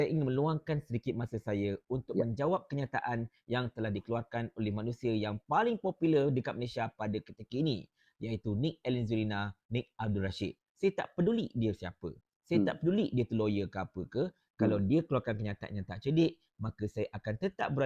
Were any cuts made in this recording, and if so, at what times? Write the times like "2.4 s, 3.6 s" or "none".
none